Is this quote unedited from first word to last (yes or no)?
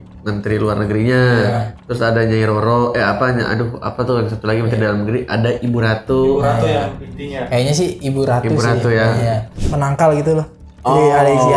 no